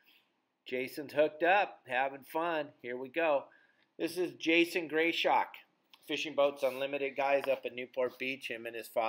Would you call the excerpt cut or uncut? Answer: uncut